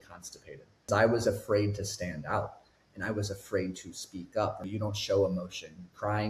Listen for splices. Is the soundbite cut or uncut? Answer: cut